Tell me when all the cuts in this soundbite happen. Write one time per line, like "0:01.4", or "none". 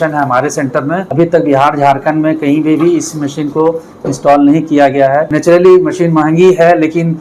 0:01.1
0:05.3